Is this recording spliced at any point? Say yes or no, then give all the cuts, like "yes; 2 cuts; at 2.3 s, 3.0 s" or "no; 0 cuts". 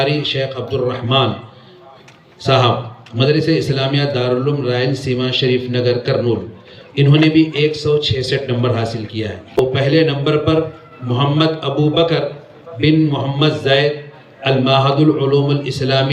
yes; 1 cut; at 9.6 s